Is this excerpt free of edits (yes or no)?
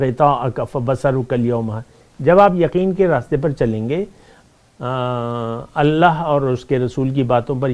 yes